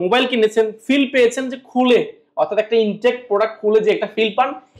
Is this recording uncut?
yes; 0 cuts

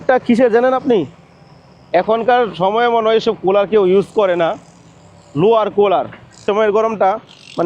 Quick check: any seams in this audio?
yes; 1 cut; at 6.4 s

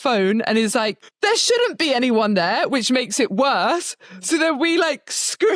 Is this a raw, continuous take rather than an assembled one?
no; 1 cut; at 1.0 s

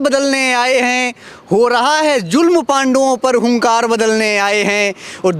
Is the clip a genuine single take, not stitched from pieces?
yes; 0 cuts

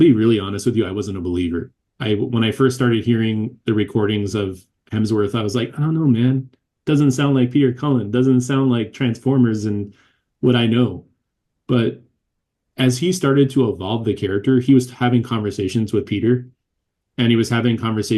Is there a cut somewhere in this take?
no; 0 cuts

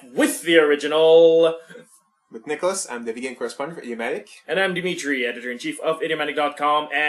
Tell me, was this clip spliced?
no; 0 cuts

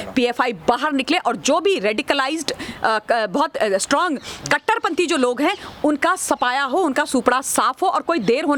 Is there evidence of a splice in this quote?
no; 0 cuts

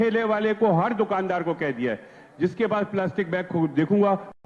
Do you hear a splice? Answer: no; 0 cuts

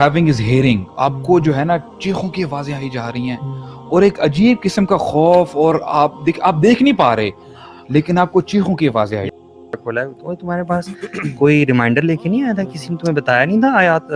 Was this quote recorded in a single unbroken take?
no; 1 cut; at 9.6 s

